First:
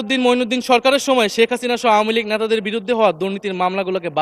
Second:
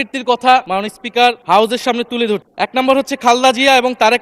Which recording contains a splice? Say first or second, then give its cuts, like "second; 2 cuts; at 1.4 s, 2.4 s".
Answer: second; 2 cuts; at 0.9 s, 2.5 s